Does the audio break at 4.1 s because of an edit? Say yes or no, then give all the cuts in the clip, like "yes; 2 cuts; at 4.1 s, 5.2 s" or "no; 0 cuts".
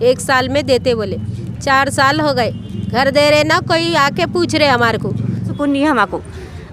no; 1 cut; at 5.5 s